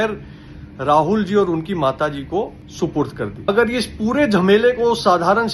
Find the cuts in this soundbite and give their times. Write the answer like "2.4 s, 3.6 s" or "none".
3.5 s